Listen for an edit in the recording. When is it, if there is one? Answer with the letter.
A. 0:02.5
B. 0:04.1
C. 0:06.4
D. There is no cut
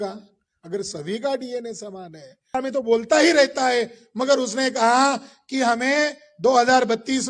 A